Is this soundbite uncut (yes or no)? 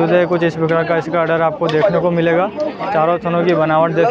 yes